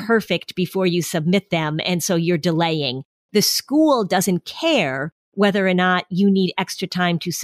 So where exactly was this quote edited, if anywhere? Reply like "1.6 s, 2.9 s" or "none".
none